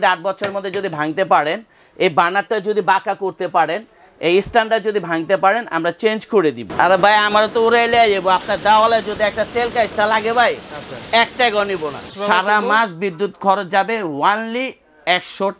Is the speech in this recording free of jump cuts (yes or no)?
no